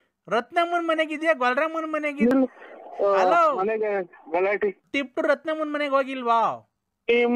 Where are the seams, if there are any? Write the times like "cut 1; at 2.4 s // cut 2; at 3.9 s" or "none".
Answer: cut 1; at 4.8 s